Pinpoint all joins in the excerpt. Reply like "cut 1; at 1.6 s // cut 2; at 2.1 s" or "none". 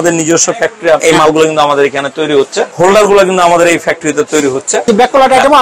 cut 1; at 1.0 s // cut 2; at 2.7 s // cut 3; at 4.9 s